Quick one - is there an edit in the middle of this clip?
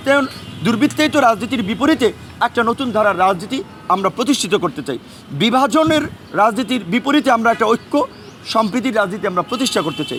no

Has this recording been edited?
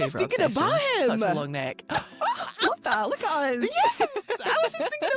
no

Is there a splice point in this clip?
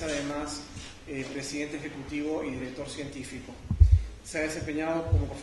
no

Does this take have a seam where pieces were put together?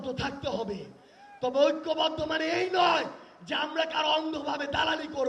no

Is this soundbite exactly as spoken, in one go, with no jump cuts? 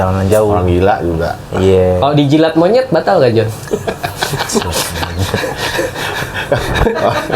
yes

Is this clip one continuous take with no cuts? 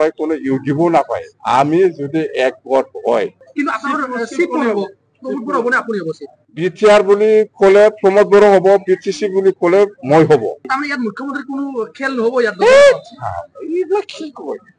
no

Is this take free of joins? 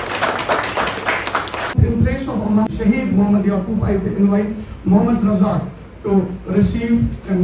no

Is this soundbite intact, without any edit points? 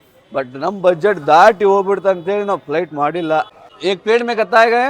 no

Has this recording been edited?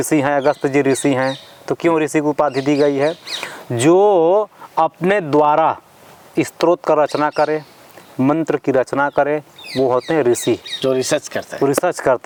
no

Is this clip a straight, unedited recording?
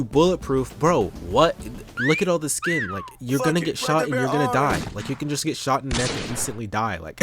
yes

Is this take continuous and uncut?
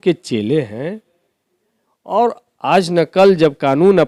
yes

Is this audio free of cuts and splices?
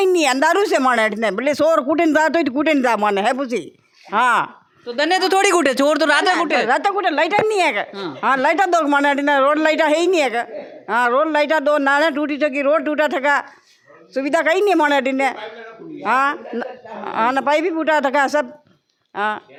yes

